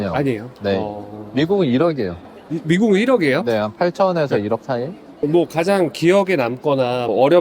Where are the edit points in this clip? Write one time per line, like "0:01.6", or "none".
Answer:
0:05.1